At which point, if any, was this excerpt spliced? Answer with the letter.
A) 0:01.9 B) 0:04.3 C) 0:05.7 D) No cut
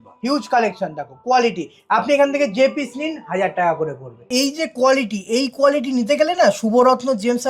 B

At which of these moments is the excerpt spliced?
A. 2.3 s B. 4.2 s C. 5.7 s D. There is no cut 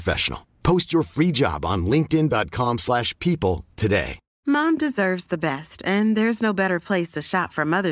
B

